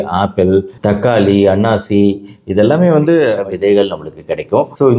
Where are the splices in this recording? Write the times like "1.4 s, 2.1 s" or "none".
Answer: 3.4 s